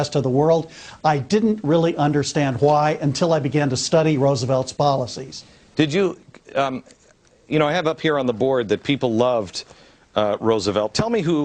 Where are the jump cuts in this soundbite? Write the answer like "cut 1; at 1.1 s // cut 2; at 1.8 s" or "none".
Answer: cut 1; at 2.4 s